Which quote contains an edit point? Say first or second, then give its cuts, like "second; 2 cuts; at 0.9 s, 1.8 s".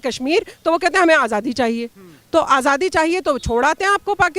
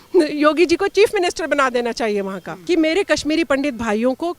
second; 1 cut; at 2.5 s